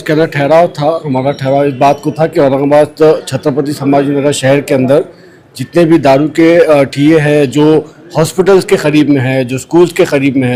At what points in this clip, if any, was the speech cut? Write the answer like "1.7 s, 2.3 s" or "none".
none